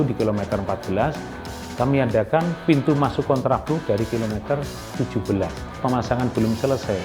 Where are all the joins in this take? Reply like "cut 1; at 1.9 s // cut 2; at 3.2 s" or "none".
cut 1; at 5.8 s